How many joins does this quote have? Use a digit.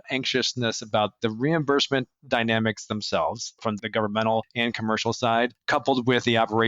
1